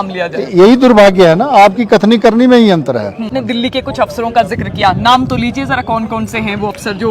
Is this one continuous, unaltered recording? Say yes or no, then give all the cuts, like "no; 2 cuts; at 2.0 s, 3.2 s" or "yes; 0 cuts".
no; 1 cut; at 3.4 s